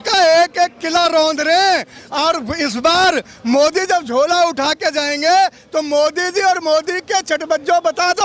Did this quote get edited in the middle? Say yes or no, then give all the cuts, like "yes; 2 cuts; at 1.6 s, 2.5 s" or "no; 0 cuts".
no; 0 cuts